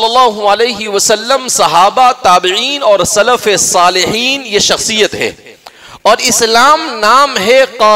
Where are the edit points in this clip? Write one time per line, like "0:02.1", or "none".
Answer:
none